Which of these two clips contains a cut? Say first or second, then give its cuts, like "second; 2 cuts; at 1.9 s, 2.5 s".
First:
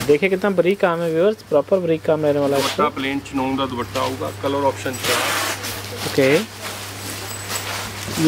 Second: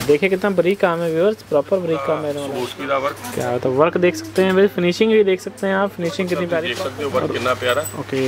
second; 2 cuts; at 2.4 s, 6.8 s